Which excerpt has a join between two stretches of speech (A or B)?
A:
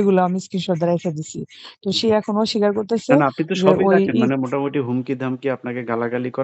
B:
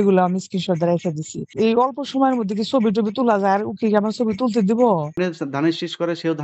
B